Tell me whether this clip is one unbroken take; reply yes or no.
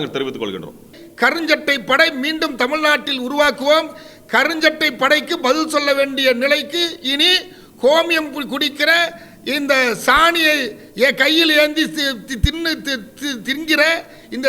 no